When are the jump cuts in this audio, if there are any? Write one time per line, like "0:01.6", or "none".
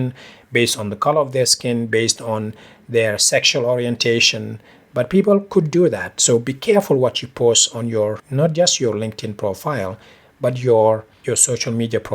0:11.1